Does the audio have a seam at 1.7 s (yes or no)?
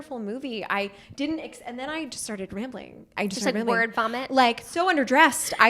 no